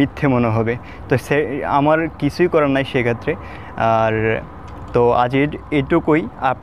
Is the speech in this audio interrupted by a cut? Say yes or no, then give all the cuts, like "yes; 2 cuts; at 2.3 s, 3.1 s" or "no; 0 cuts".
no; 0 cuts